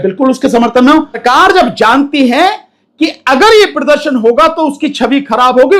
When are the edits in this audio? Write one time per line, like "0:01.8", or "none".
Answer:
0:01.2